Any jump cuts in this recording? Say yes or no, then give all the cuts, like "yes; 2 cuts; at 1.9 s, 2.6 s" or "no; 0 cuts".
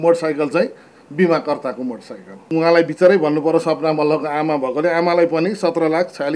yes; 1 cut; at 2.4 s